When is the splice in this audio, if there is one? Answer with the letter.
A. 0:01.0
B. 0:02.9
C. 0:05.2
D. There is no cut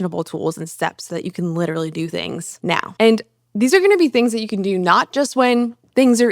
B